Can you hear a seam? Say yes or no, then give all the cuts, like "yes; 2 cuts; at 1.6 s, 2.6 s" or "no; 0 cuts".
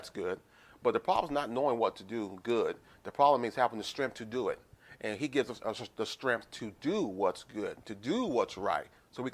no; 0 cuts